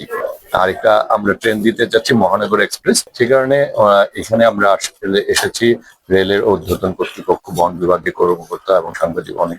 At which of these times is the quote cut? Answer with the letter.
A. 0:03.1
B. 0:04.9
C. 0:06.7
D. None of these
A